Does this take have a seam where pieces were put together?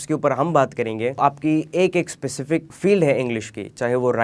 yes; 2 cuts; at 1.2 s, 2.7 s

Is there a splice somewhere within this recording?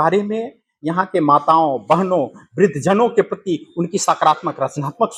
no; 0 cuts

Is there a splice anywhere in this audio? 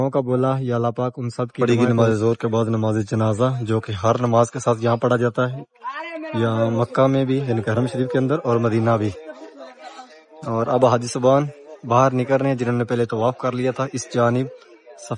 yes; 1 cut; at 1.6 s

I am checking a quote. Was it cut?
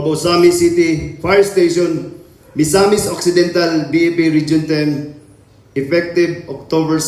no; 0 cuts

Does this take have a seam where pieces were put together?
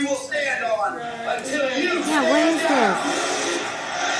no; 0 cuts

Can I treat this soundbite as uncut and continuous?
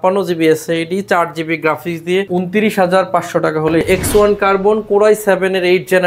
no; 2 cuts; at 2.3 s, 3.8 s

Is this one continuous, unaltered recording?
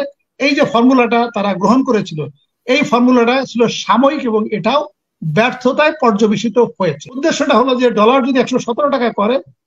no; 1 cut; at 7.2 s

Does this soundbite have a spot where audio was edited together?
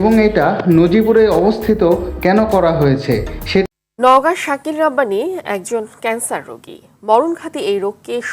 yes; 1 cut; at 3.7 s

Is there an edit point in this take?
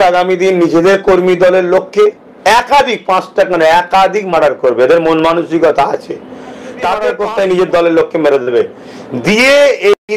yes; 1 cut; at 7.1 s

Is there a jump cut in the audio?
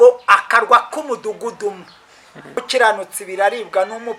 yes; 1 cut; at 2.6 s

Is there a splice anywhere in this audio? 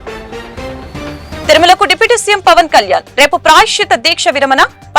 yes; 1 cut; at 1.5 s

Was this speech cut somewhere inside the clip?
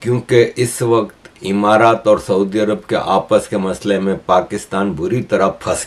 no; 0 cuts

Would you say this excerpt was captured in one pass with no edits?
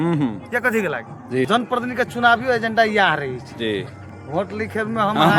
no; 1 cut; at 1.5 s

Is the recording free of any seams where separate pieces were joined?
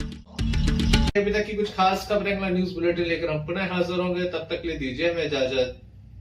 yes; 0 cuts

